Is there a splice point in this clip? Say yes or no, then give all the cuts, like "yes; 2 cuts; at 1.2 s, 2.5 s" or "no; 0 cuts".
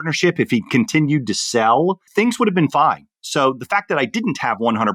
no; 0 cuts